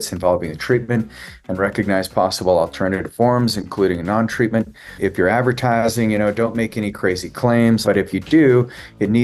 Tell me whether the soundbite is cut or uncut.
cut